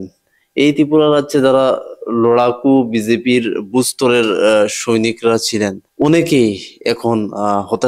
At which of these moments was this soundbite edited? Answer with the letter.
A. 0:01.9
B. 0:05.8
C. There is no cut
B